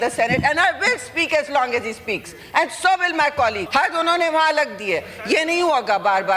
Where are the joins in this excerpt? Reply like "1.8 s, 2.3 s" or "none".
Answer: 3.6 s